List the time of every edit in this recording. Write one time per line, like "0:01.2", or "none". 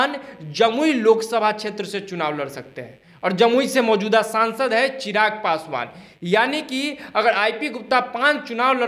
none